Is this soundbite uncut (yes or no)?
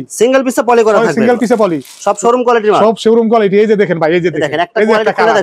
yes